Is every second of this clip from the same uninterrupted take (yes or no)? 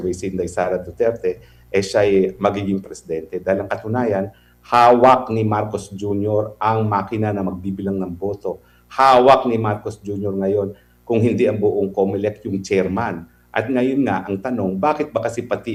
yes